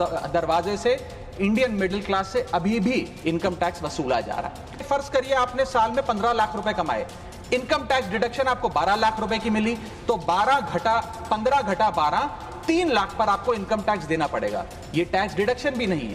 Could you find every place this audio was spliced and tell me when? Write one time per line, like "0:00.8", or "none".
0:04.8